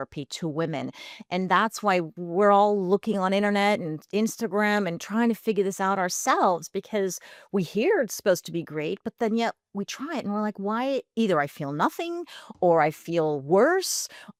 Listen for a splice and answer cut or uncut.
uncut